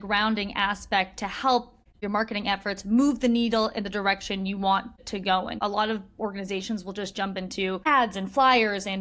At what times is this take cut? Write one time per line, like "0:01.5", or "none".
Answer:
0:01.8
0:05.1
0:07.9